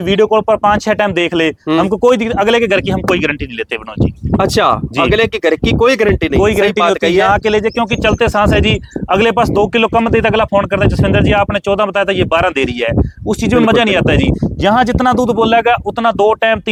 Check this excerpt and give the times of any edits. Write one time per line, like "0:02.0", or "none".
none